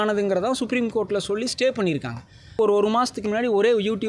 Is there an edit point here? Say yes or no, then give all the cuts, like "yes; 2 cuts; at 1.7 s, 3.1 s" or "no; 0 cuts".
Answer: yes; 1 cut; at 2.6 s